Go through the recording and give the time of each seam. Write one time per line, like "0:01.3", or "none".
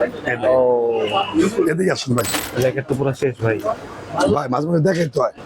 0:02.4